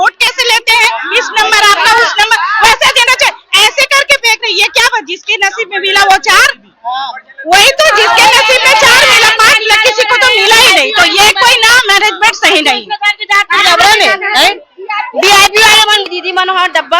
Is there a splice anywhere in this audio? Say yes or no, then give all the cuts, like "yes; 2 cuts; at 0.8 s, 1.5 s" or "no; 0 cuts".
yes; 1 cut; at 16.0 s